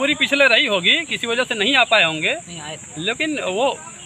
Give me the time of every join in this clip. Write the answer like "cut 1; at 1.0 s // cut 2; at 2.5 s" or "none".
none

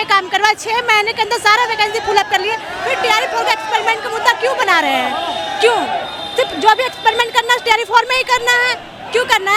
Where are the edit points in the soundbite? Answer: none

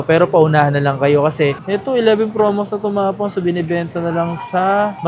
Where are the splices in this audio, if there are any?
cut 1; at 1.6 s

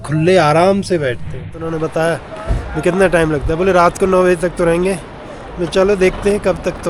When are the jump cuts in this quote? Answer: cut 1; at 1.6 s

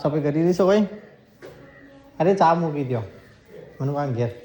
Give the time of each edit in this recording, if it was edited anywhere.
none

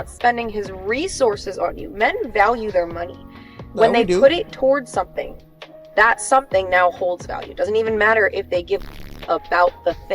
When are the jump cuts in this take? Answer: cut 1; at 8.3 s

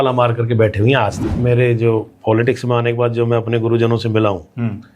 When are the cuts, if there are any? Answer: cut 1; at 1.3 s

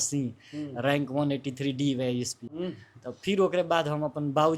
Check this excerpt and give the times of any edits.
cut 1; at 2.6 s

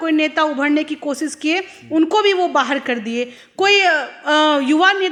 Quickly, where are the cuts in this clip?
none

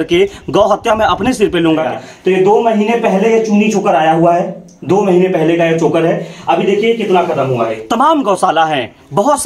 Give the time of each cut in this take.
cut 1; at 1.8 s // cut 2; at 7.8 s

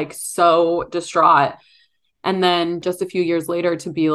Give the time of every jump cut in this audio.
cut 1; at 2.8 s

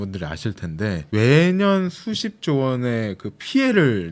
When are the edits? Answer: cut 1; at 1.0 s

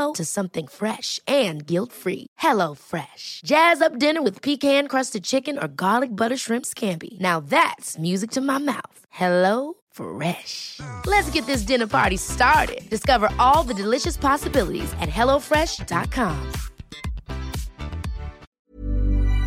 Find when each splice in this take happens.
cut 1; at 18.5 s

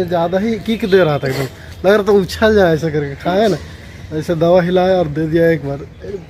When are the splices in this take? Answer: cut 1; at 1.4 s

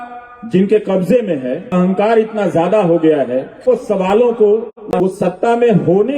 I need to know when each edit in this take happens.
cut 1; at 1.7 s // cut 2; at 3.6 s

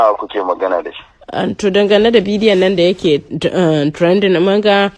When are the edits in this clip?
none

